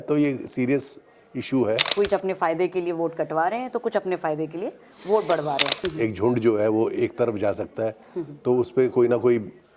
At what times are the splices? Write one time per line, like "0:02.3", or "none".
0:01.9
0:05.8